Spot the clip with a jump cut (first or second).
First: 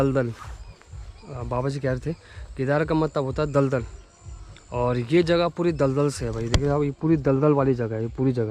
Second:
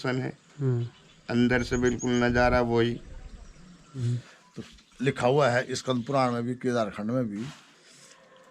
second